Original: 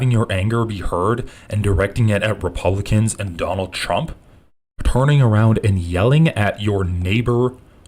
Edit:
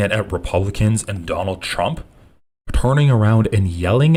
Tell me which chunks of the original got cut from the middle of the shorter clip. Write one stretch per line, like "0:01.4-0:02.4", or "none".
none